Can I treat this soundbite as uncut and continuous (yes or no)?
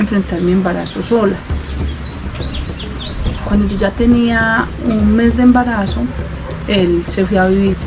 yes